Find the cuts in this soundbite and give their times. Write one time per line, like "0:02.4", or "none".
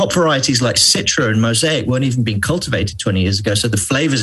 none